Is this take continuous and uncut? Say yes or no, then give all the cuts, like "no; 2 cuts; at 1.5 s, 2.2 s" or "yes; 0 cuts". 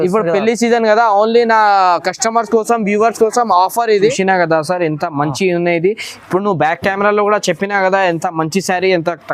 no; 1 cut; at 4.2 s